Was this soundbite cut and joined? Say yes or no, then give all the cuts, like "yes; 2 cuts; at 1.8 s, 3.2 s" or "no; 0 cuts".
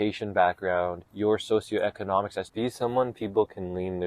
yes; 2 cuts; at 1.0 s, 2.4 s